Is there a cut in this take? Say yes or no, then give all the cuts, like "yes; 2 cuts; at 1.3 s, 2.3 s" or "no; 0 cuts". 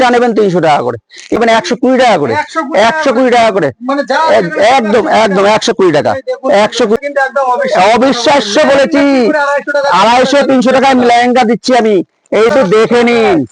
yes; 3 cuts; at 1.4 s, 7.0 s, 12.5 s